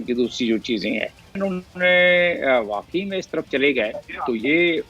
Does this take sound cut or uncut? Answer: cut